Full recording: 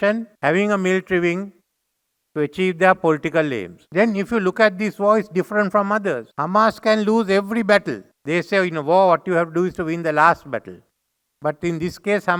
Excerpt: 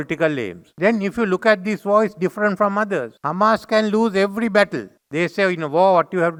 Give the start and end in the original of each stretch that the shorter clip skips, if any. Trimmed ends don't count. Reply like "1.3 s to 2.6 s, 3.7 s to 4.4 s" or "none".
none